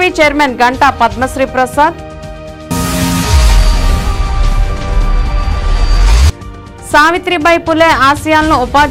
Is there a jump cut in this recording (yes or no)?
no